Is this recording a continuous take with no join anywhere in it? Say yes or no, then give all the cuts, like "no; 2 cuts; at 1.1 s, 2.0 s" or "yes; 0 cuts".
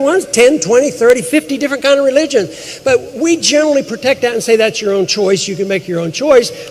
yes; 0 cuts